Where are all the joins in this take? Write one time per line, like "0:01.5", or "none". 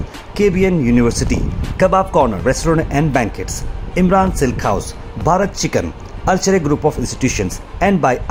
none